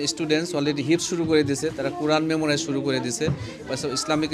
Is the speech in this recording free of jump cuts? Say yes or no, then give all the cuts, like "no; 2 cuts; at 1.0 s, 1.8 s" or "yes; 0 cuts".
yes; 0 cuts